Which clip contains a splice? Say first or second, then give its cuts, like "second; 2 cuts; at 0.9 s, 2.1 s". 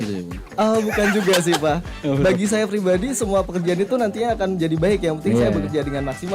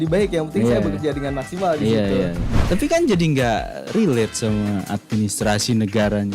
second; 1 cut; at 2.6 s